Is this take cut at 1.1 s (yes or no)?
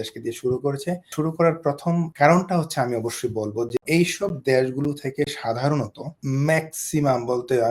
yes